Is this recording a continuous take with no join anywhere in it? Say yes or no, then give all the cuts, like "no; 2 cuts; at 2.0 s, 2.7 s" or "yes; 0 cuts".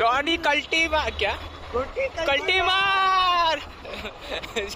yes; 0 cuts